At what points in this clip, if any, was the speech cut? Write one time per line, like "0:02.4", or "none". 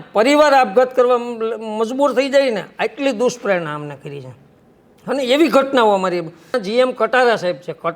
0:06.6